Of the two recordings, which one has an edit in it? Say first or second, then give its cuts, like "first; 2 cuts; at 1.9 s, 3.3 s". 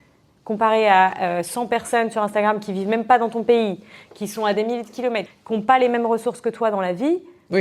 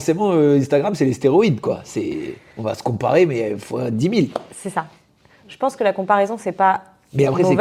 first; 1 cut; at 5.3 s